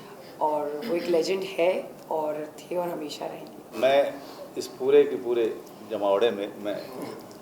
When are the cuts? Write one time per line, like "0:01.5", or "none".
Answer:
0:03.6